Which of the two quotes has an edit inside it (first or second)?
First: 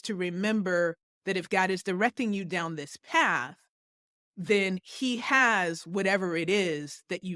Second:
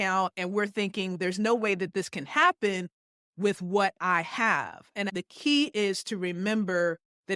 second